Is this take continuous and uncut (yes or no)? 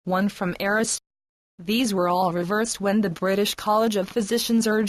yes